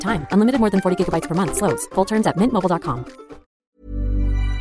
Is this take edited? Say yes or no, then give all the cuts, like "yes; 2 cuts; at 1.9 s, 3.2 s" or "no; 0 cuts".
yes; 1 cut; at 3.6 s